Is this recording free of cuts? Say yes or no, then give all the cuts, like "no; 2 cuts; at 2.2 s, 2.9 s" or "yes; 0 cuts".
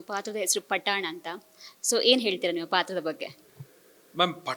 yes; 0 cuts